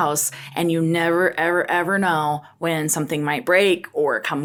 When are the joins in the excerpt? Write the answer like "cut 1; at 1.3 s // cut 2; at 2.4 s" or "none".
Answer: none